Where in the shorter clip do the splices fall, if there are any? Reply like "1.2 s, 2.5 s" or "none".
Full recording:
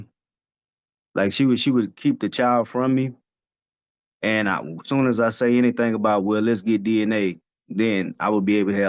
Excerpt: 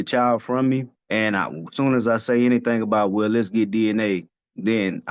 1.0 s

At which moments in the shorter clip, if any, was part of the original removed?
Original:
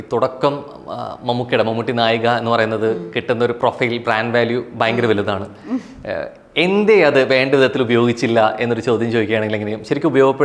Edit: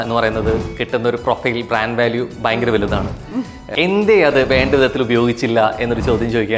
3.6 s

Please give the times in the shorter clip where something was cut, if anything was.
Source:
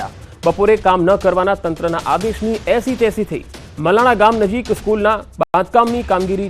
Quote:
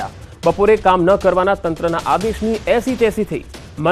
none

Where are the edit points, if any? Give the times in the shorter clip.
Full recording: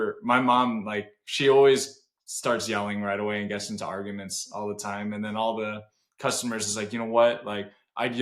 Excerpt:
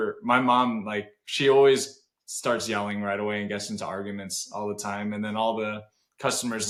none

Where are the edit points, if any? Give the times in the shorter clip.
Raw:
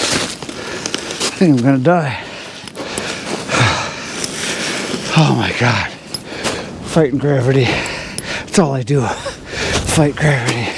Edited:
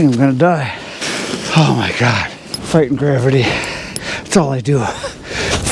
1.0 s, 2.5 s

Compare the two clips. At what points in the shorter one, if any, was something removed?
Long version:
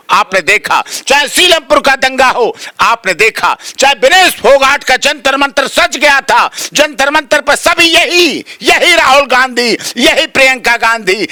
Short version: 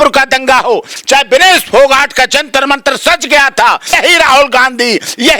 0.9 s, 3.9 s

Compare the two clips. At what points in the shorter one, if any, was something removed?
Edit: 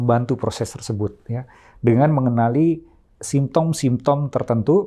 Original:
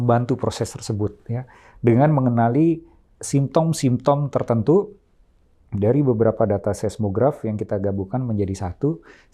none

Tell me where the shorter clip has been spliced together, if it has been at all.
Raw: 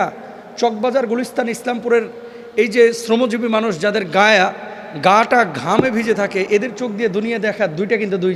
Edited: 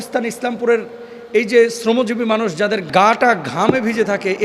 2.8 s

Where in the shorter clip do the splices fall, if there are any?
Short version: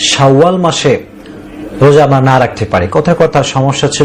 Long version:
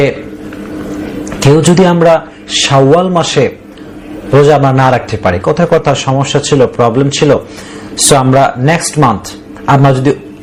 none

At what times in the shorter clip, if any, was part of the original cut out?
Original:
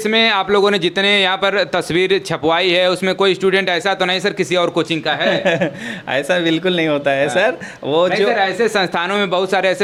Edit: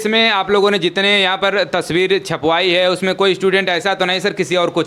none

